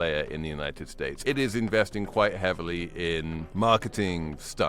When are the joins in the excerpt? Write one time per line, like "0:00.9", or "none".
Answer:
0:01.0
0:03.4